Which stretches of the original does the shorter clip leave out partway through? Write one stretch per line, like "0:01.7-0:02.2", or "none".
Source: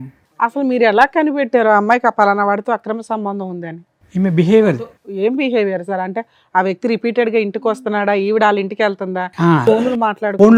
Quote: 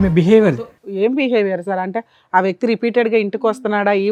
none

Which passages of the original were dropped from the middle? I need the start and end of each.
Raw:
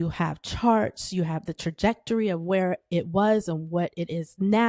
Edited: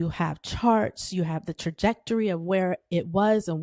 none

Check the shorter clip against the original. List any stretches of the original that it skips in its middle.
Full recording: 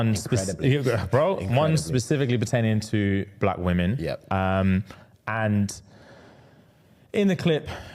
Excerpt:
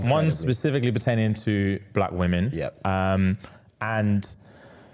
none

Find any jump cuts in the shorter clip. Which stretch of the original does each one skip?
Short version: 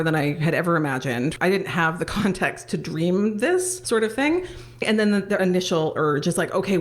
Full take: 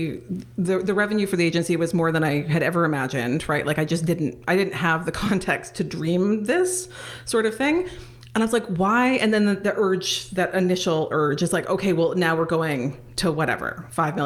0:03.4-0:04.4
0:06.8-0:07.2
0:08.3-0:10.0

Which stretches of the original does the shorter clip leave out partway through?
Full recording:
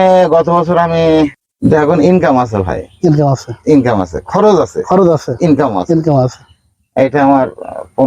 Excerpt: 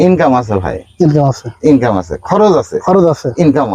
none

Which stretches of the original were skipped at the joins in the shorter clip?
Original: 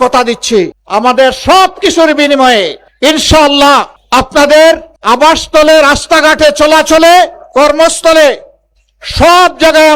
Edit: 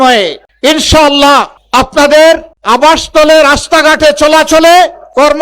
none

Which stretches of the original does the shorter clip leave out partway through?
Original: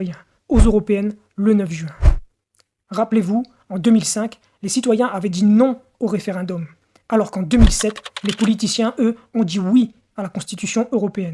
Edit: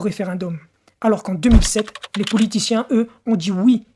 none

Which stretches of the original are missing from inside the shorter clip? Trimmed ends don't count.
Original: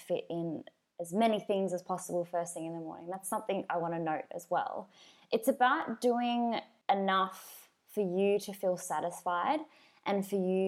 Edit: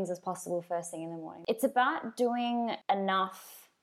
0:02.9-0:05.1
0:06.6-0:06.8

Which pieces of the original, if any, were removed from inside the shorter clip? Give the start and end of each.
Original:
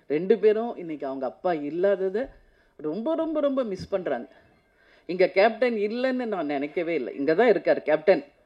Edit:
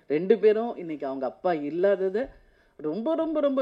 none

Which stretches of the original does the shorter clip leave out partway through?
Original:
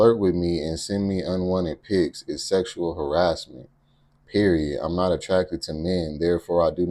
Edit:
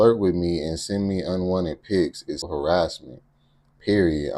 0:02.4-0:02.9

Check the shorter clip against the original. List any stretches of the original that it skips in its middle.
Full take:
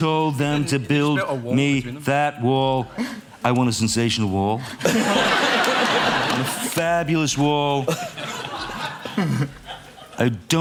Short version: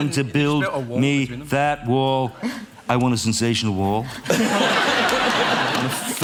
none

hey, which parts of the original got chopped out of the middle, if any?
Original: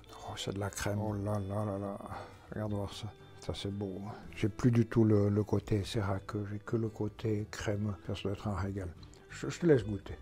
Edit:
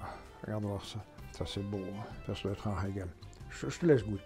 0:04.3-0:08.0

